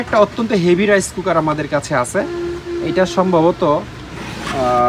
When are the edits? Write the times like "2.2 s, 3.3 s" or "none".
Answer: none